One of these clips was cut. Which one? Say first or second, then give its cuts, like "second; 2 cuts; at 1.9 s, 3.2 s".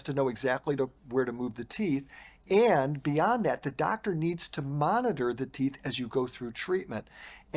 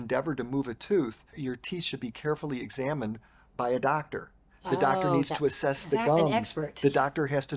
second; 1 cut; at 1.3 s